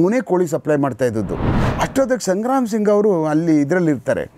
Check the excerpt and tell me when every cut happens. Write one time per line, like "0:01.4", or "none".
0:01.3